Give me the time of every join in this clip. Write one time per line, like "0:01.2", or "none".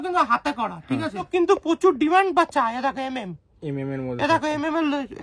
0:01.3